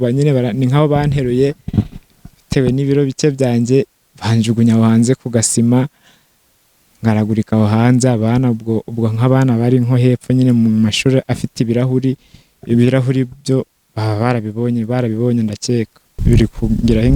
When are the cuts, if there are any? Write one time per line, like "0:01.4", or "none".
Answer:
0:16.2